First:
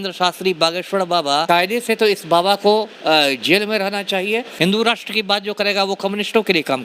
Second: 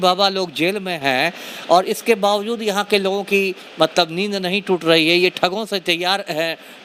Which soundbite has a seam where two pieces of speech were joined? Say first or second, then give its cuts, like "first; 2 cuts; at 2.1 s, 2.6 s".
first; 2 cuts; at 1.4 s, 4.5 s